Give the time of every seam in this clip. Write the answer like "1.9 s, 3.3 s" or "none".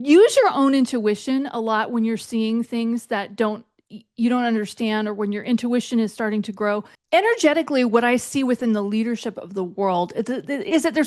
6.9 s